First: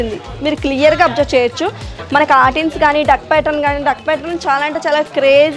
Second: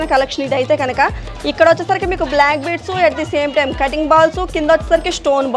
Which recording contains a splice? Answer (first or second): first